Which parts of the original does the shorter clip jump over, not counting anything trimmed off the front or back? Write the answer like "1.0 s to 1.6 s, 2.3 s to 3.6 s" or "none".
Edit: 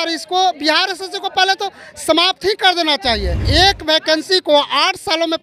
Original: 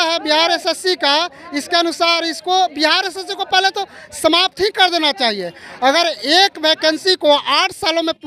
5.6 s to 6.2 s